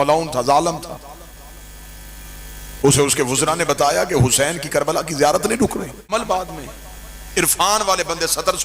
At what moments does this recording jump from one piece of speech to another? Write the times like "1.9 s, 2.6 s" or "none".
6.1 s